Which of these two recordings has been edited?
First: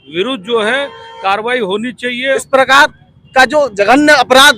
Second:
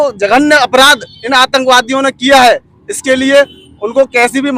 first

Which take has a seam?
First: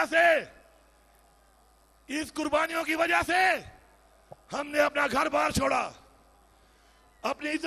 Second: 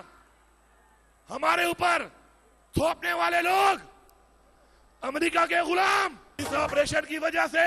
second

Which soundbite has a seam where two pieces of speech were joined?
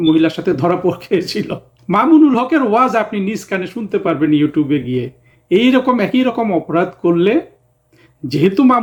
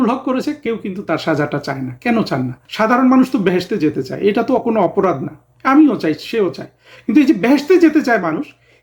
second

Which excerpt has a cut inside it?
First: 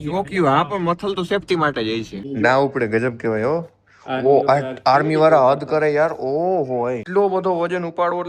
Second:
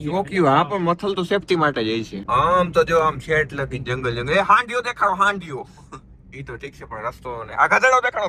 first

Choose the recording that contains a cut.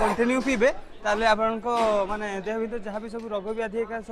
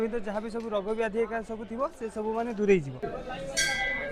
second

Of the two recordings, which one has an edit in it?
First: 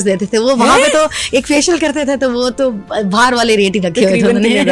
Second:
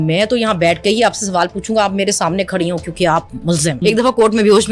second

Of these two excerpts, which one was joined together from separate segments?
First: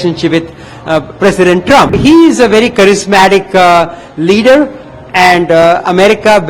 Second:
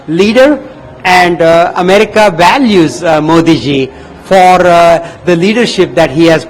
first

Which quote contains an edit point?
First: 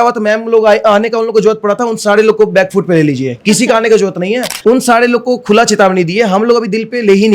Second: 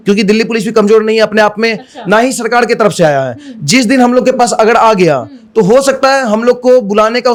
first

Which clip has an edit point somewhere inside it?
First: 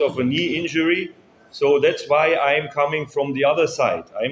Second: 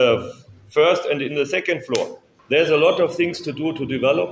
second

